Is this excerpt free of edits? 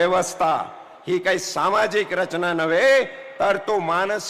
yes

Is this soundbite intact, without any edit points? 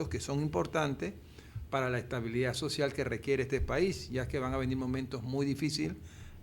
yes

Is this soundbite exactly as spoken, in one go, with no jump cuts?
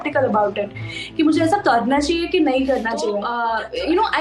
no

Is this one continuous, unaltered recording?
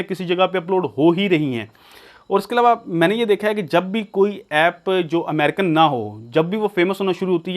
yes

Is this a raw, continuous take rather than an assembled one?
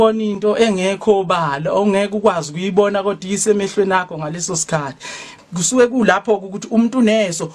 no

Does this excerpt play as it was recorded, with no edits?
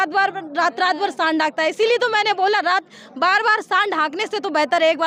yes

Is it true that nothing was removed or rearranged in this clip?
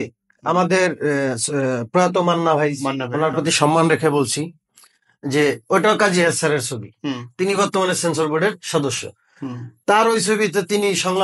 yes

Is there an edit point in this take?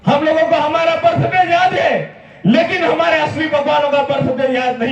no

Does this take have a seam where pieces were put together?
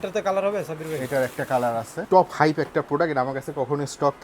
yes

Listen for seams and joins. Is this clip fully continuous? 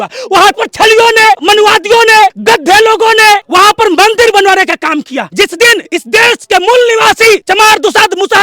no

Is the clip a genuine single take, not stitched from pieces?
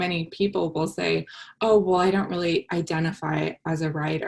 yes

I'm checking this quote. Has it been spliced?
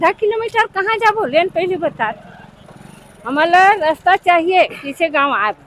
no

